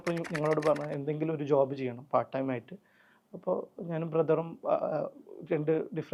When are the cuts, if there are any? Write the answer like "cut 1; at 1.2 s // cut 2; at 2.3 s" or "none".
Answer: none